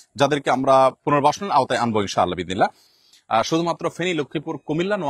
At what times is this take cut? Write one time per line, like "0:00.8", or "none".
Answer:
0:01.0
0:02.9

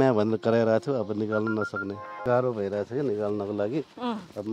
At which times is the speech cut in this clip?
0:02.2

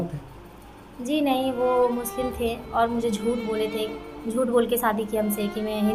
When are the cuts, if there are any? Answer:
none

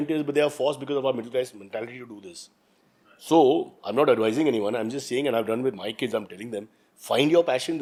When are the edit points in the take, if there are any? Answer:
none

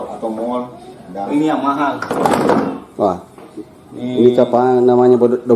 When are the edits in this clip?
0:01.3

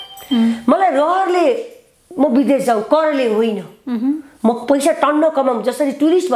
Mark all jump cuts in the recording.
none

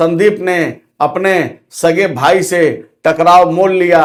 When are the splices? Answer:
none

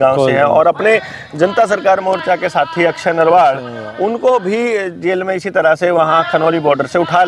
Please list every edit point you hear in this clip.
none

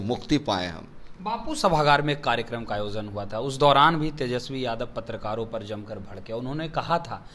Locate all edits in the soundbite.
none

